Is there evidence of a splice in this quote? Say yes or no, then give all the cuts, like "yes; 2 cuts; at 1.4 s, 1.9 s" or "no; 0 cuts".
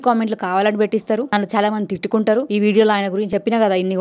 yes; 3 cuts; at 1.3 s, 2.5 s, 3.3 s